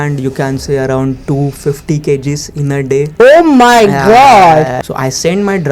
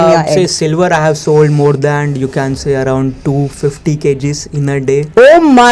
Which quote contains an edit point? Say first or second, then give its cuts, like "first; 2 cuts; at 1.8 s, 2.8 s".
first; 1 cut; at 4.8 s